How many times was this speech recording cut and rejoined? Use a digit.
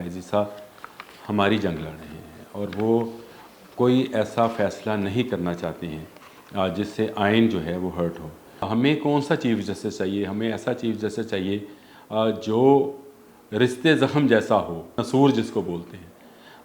2